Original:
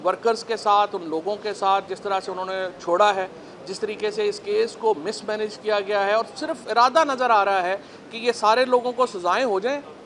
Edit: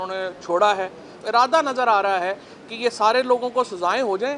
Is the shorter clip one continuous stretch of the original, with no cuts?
no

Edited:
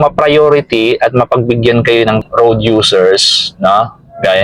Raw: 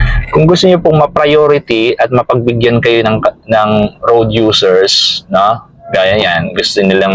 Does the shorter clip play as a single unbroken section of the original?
no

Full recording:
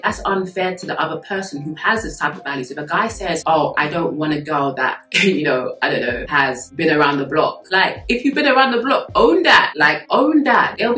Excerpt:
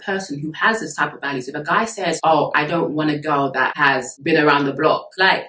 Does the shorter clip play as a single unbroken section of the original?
no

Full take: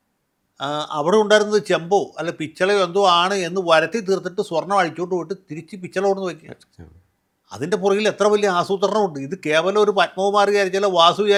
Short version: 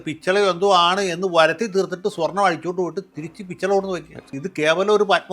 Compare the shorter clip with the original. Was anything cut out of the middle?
yes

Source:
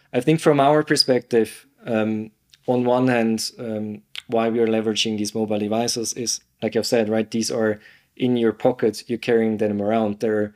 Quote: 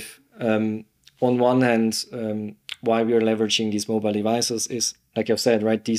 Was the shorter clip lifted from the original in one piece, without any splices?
yes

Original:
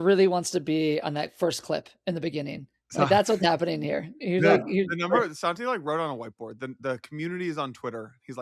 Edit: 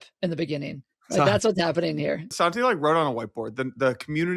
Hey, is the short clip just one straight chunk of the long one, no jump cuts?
no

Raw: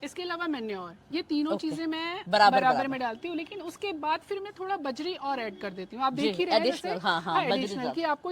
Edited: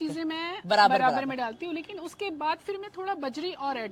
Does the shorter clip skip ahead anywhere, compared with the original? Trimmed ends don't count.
no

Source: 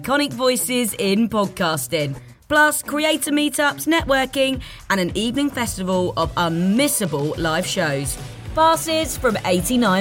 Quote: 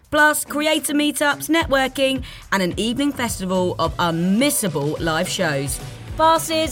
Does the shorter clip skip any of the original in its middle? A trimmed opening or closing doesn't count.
no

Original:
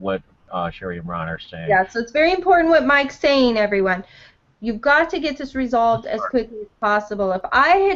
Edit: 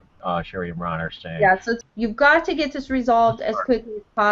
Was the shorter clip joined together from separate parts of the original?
yes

